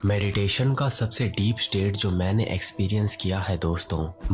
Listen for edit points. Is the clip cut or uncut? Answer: uncut